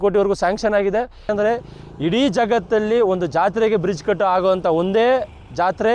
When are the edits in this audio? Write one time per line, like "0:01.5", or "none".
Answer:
0:01.3

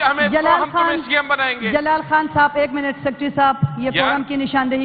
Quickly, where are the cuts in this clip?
none

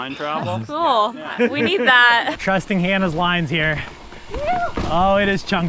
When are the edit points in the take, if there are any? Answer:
0:02.3

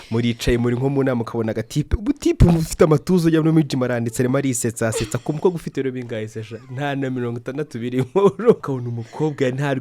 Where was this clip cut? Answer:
0:08.6

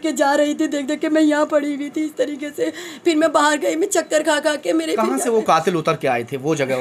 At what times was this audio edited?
none

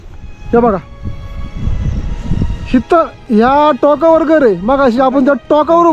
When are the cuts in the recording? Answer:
none

